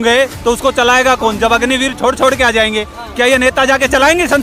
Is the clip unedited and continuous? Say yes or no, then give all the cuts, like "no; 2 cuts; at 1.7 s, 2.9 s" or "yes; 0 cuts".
yes; 0 cuts